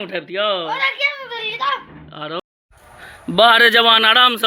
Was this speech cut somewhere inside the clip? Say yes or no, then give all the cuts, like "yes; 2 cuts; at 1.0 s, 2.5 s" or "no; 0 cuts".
yes; 1 cut; at 2.4 s